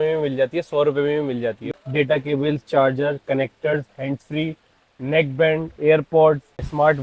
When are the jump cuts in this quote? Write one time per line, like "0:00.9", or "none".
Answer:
0:01.6